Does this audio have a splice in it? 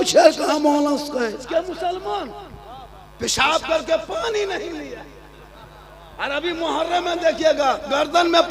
yes; 1 cut; at 1.4 s

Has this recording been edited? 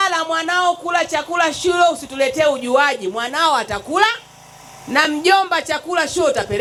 no; 0 cuts

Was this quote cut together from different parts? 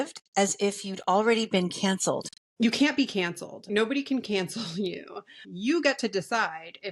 yes; 3 cuts; at 2.4 s, 3.7 s, 5.4 s

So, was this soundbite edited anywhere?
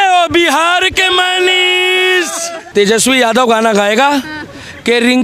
no; 0 cuts

